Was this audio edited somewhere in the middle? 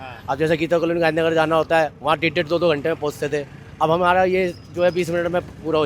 no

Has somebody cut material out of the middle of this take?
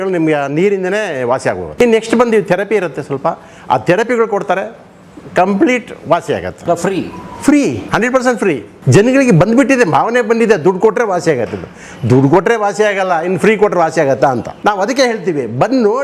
yes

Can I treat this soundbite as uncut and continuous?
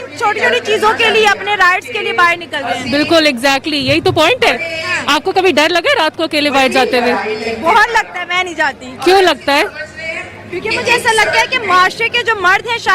yes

